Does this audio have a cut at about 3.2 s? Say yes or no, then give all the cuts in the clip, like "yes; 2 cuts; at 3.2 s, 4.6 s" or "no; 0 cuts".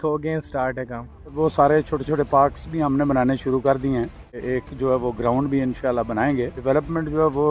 no; 3 cuts; at 1.3 s, 4.4 s, 6.6 s